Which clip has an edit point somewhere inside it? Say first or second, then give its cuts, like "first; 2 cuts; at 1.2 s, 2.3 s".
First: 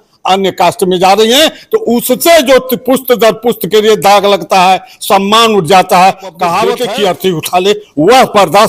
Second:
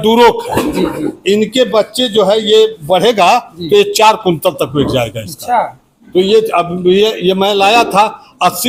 first; 1 cut; at 6.8 s